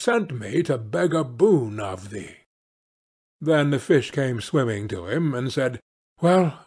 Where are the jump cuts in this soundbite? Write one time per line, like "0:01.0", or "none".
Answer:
none